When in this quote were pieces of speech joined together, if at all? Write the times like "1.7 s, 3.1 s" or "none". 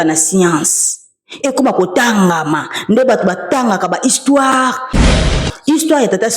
5.1 s